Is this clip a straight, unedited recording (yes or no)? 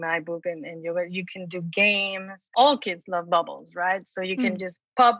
no